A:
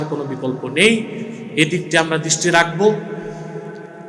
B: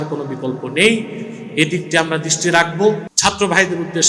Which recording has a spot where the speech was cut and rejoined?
B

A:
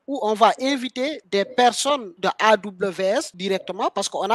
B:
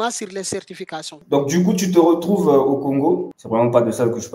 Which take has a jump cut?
B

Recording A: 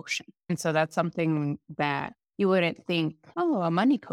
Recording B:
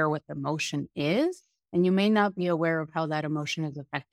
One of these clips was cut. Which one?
A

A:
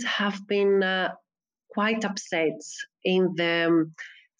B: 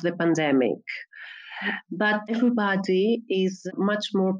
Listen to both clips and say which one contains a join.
B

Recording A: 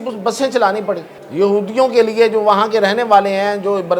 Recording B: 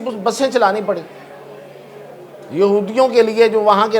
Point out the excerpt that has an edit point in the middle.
A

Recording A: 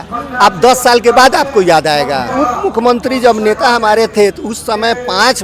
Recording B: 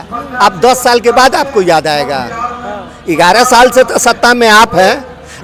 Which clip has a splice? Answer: A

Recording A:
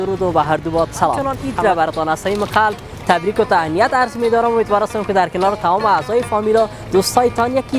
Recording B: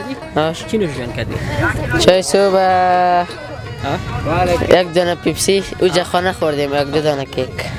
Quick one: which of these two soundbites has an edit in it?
A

